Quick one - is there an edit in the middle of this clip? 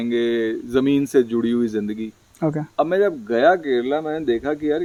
no; 0 cuts

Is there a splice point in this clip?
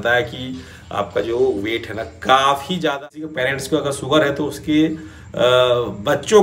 yes; 1 cut; at 3.0 s

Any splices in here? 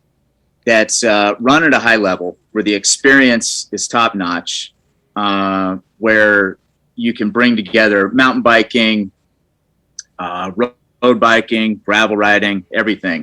no; 0 cuts

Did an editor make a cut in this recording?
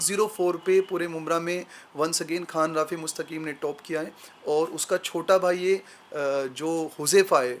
no; 0 cuts

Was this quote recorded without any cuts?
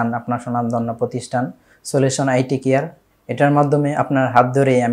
yes; 0 cuts

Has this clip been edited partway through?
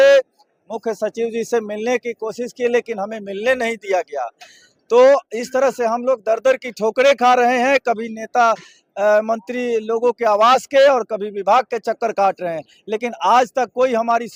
no; 0 cuts

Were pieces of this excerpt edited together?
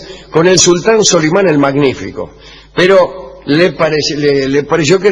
yes; 1 cut; at 2.8 s

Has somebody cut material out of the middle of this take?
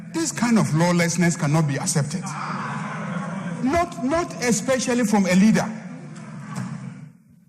no; 0 cuts

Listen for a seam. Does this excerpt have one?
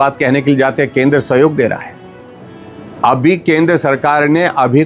no; 0 cuts

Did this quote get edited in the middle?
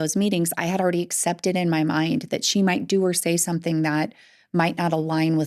no; 0 cuts

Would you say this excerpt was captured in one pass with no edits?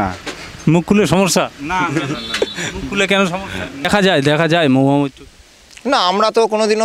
no; 1 cut; at 3.9 s

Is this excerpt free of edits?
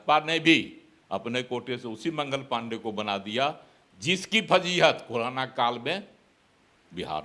yes; 0 cuts

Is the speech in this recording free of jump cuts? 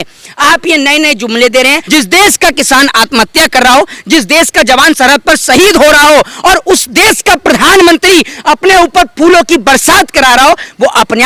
no; 1 cut; at 1.8 s

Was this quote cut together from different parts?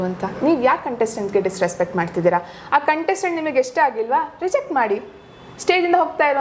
no; 0 cuts

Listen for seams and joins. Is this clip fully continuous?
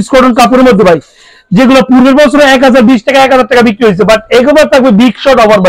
yes; 0 cuts

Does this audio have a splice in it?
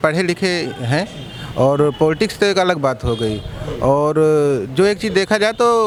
no; 0 cuts

